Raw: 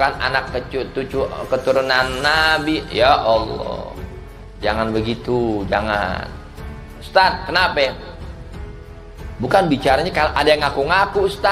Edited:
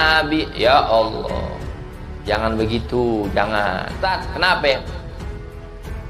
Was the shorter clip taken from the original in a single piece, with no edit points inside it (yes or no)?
no